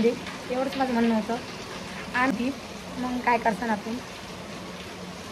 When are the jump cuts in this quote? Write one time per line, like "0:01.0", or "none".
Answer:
0:02.3